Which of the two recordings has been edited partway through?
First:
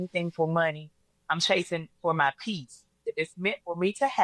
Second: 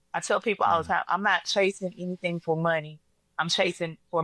first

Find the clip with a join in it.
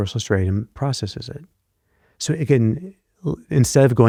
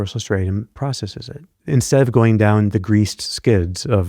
second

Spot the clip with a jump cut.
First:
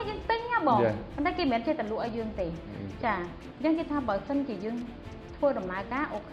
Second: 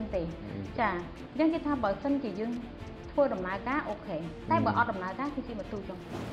first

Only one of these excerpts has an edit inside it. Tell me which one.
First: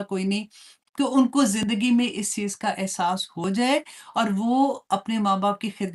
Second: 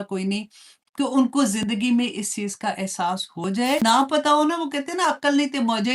second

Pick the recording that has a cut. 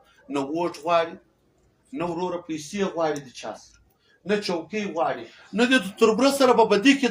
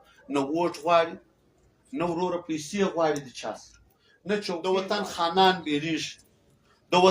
second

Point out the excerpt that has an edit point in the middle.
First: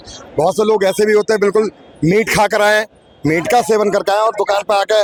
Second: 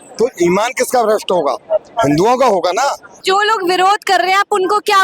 second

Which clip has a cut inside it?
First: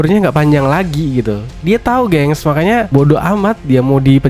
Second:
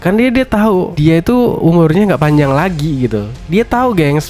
second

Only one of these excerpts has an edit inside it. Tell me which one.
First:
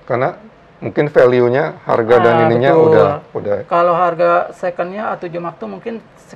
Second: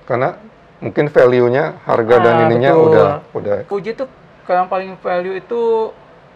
second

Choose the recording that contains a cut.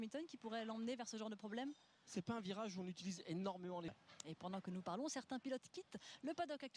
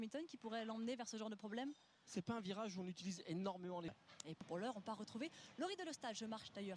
first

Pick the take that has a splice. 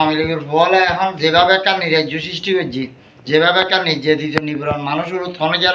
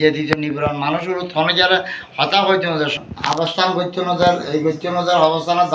second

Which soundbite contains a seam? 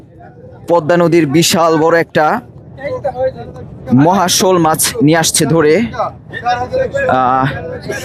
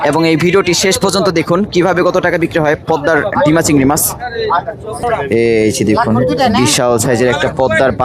second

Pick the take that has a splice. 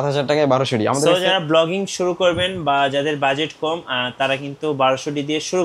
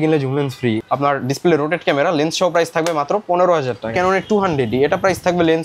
second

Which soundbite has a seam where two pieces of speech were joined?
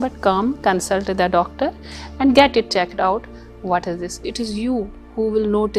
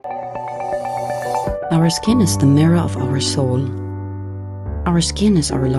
first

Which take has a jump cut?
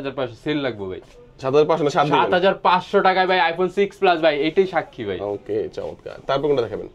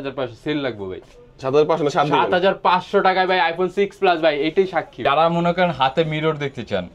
second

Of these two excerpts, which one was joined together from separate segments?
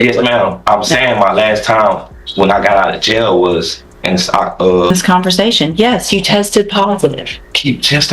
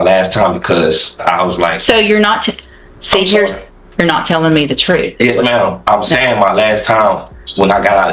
first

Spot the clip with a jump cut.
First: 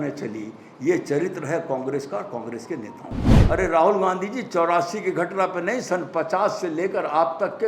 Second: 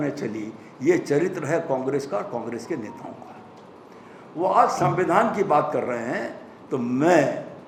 first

